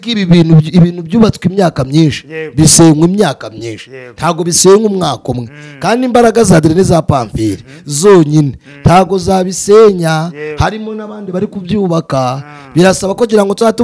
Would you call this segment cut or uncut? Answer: uncut